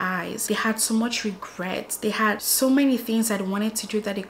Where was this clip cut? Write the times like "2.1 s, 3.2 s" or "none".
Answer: none